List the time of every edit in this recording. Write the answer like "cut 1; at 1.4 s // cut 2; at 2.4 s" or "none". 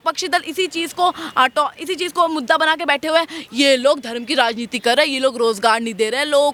none